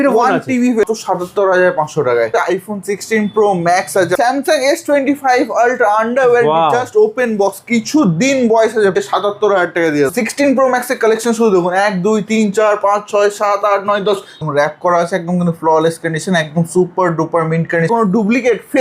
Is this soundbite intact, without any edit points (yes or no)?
no